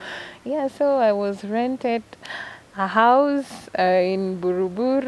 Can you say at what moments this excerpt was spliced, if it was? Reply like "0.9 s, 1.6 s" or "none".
none